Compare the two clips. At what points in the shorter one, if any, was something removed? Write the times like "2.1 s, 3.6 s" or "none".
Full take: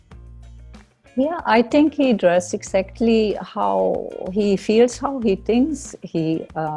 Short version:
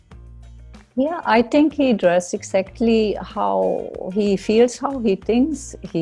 0.9 s